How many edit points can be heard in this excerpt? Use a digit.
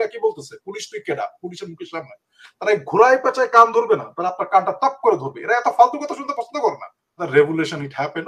1